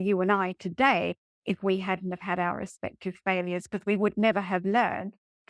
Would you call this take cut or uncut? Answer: uncut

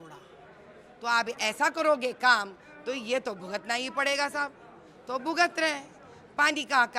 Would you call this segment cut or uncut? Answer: uncut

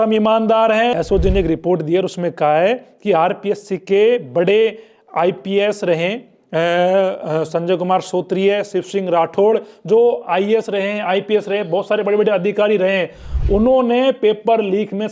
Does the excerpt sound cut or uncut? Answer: cut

